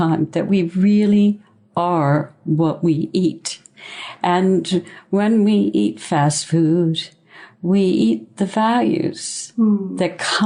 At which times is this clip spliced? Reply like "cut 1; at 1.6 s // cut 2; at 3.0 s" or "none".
none